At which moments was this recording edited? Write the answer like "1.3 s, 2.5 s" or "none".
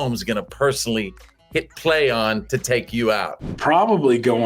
3.5 s